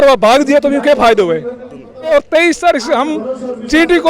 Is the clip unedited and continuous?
no; 1 cut; at 2.1 s

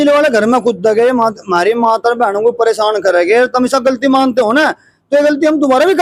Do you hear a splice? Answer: no; 0 cuts

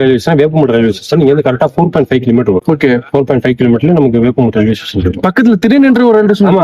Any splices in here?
no; 0 cuts

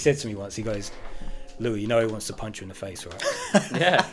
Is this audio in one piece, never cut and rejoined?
yes; 0 cuts

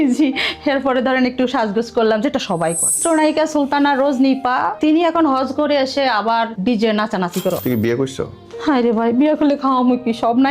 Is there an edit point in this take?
yes; 5 cuts; at 3.0 s, 4.7 s, 6.5 s, 7.6 s, 8.4 s

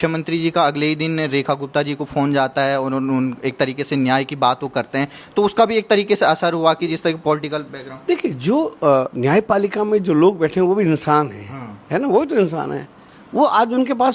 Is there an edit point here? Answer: no; 0 cuts

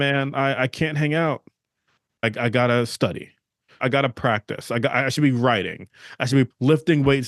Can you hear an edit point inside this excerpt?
yes; 3 cuts; at 2.2 s, 3.8 s, 6.5 s

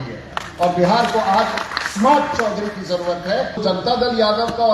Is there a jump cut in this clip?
yes; 1 cut; at 3.6 s

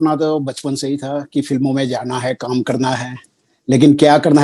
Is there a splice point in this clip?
no; 0 cuts

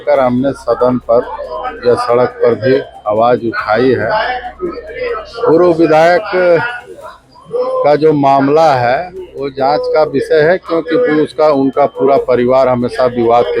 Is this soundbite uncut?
yes; 0 cuts

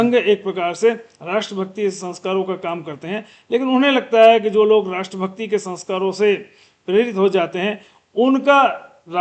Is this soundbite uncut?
yes; 0 cuts

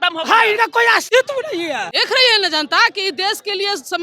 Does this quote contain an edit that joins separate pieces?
yes; 2 cuts; at 1.1 s, 1.9 s

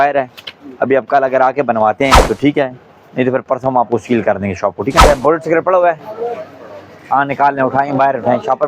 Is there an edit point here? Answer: yes; 2 cuts; at 2.2 s, 5.0 s

